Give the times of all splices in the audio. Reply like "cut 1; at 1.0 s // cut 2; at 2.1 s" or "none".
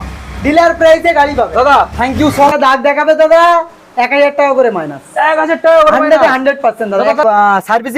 cut 1; at 2.5 s // cut 2; at 7.2 s